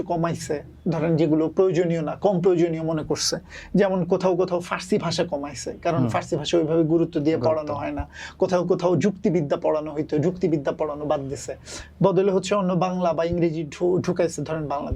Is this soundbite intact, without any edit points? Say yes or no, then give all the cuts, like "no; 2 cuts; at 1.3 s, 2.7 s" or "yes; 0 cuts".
yes; 0 cuts